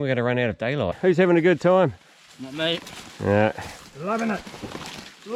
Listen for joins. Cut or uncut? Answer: cut